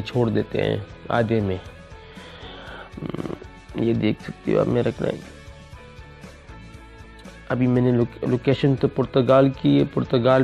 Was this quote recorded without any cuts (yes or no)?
no